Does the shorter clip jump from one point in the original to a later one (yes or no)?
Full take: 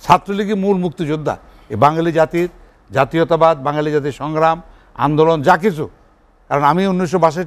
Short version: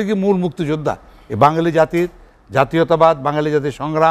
no